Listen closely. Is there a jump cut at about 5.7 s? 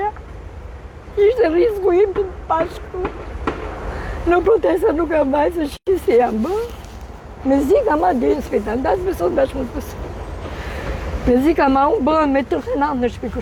no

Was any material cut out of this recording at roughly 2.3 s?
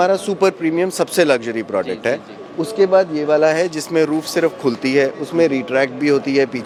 no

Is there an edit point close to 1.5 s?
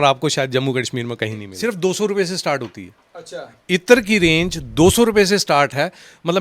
yes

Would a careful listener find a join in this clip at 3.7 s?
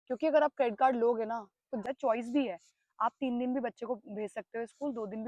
no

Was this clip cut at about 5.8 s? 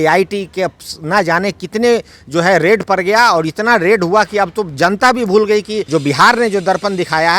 yes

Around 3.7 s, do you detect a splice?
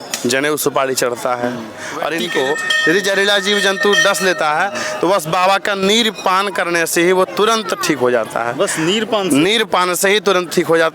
no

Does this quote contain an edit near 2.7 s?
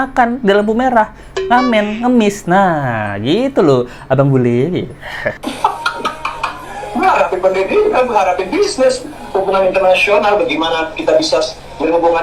no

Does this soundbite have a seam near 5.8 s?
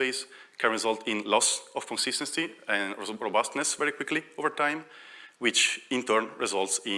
no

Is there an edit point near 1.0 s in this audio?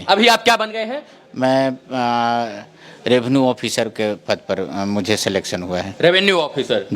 no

